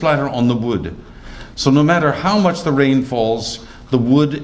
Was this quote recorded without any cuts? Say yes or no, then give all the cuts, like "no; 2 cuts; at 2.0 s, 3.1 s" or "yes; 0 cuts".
yes; 0 cuts